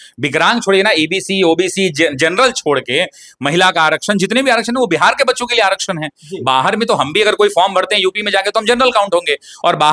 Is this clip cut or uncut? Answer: uncut